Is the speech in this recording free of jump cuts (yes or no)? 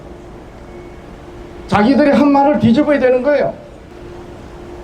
no